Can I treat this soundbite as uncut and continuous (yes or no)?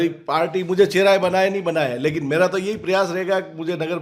yes